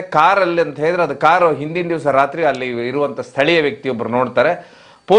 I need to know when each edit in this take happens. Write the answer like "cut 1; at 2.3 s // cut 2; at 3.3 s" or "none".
none